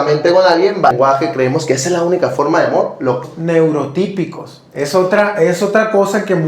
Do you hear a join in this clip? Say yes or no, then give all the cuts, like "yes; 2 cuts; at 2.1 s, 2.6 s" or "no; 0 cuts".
yes; 2 cuts; at 0.9 s, 3.2 s